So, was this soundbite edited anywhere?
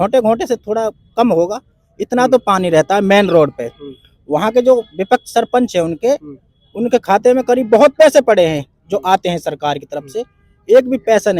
no; 0 cuts

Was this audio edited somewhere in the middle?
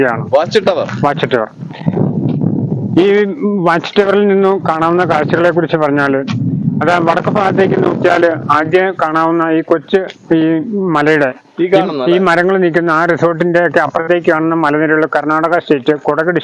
no; 0 cuts

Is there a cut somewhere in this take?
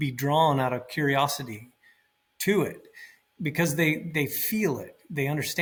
no; 0 cuts

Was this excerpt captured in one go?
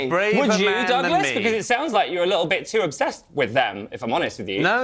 yes; 0 cuts

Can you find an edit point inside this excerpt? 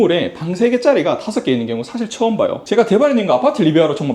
yes; 1 cut; at 2.6 s

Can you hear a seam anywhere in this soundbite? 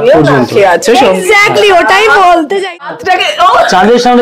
yes; 1 cut; at 2.7 s

